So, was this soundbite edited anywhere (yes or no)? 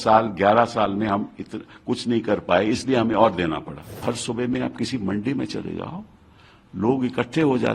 yes